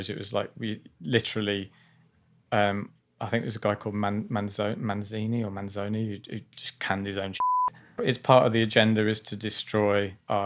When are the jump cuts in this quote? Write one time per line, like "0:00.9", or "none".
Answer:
0:07.9